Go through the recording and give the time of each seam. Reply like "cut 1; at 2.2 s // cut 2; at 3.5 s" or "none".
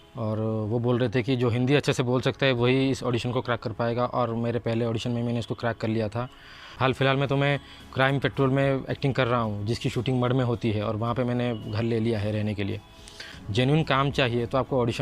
cut 1; at 6.6 s // cut 2; at 13.4 s